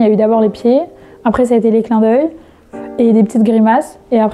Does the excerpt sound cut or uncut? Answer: uncut